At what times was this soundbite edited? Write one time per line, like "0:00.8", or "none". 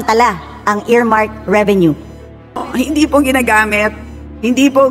0:02.7